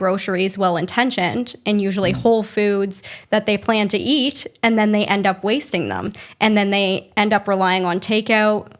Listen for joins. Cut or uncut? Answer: uncut